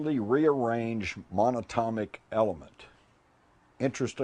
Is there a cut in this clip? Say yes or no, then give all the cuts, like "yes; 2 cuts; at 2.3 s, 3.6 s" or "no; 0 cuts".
no; 0 cuts